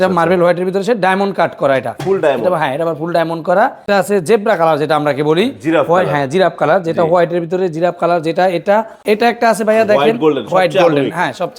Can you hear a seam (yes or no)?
yes